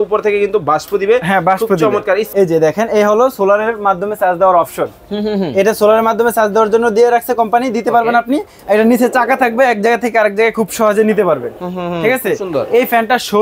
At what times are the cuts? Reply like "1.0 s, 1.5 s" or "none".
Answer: 2.3 s